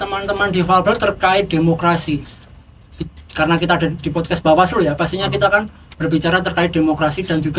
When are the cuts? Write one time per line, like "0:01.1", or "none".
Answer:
none

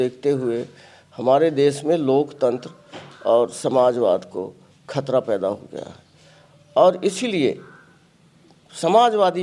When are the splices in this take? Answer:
none

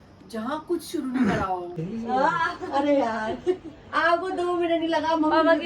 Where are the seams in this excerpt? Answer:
0:01.8

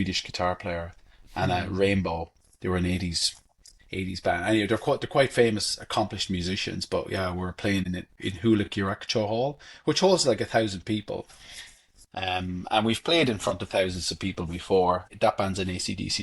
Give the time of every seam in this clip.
0:07.8
0:15.1

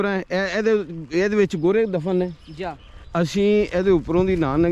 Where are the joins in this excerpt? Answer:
0:03.0

